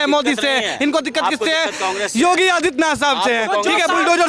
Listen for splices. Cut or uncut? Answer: uncut